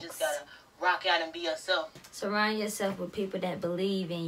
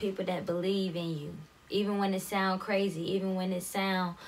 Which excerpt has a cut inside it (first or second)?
first